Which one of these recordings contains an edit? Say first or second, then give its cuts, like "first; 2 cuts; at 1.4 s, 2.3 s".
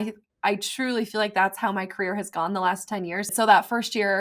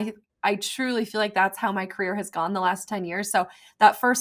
first; 1 cut; at 3.3 s